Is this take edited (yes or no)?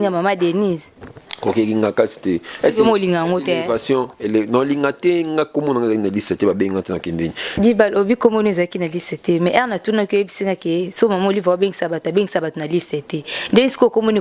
yes